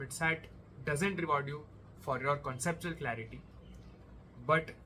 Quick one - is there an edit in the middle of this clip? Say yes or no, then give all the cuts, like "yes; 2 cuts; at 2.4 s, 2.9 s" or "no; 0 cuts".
no; 0 cuts